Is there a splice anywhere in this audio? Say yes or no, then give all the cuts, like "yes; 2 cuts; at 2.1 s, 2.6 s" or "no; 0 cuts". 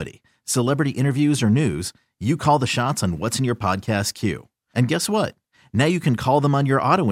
no; 0 cuts